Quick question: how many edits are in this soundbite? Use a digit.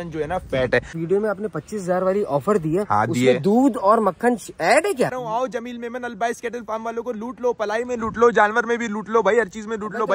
2